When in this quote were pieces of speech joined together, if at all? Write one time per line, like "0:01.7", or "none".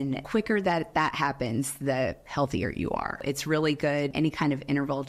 0:03.2
0:04.1